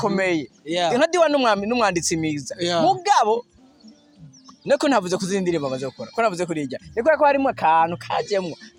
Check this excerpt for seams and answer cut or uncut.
uncut